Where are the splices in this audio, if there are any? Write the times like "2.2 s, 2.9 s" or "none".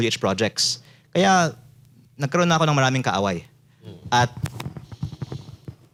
none